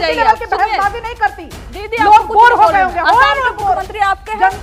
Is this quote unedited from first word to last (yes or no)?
yes